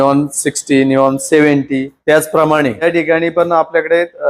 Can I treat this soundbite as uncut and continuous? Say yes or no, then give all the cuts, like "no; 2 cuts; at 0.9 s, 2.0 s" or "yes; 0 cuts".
no; 2 cuts; at 1.9 s, 2.8 s